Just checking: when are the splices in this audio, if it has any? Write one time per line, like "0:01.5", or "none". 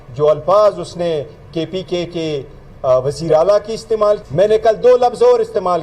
0:04.2